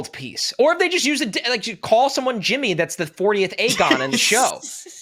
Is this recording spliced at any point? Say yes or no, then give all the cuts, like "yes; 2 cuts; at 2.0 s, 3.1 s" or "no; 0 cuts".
no; 0 cuts